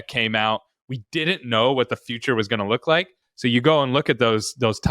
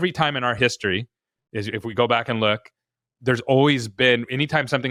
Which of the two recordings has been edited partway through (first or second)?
first